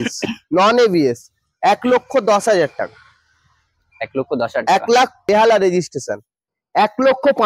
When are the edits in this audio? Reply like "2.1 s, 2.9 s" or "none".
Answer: 5.2 s